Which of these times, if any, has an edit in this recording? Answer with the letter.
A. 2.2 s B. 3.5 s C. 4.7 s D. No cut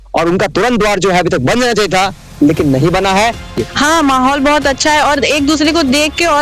B